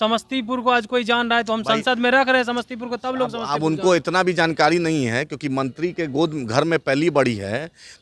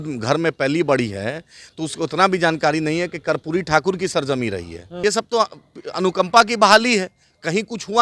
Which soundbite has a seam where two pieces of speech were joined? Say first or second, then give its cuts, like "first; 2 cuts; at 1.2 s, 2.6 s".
second; 1 cut; at 5.0 s